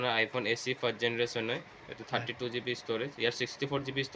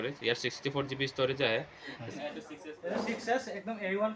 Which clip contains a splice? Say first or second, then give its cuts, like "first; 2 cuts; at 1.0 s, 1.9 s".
second; 1 cut; at 2.1 s